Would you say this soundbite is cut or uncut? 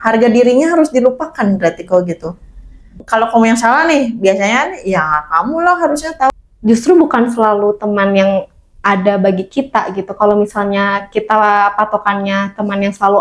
cut